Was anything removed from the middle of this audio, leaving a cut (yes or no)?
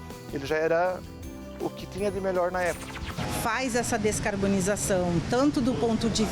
yes